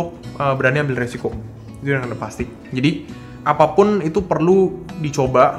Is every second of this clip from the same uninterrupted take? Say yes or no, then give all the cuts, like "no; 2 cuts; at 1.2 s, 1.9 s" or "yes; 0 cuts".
no; 1 cut; at 3.3 s